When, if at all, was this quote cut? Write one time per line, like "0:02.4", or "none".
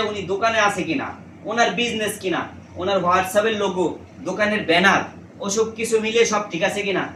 none